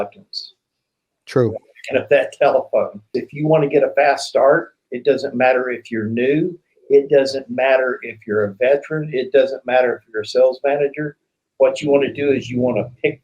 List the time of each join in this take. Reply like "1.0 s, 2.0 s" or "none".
3.2 s